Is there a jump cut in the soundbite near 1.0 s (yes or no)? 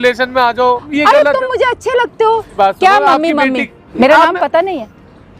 no